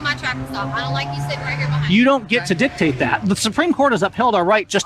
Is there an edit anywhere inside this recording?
yes; 1 cut; at 3.2 s

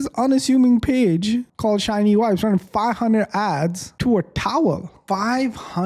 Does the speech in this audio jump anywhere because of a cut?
yes; 1 cut; at 4.9 s

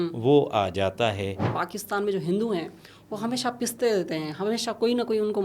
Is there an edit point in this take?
yes; 1 cut; at 1.5 s

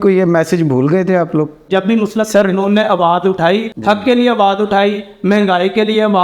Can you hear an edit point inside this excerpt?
yes; 2 cuts; at 1.7 s, 3.7 s

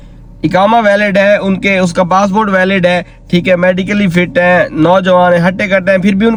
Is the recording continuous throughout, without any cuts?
yes; 0 cuts

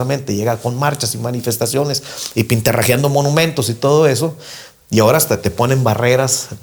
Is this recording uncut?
yes; 0 cuts

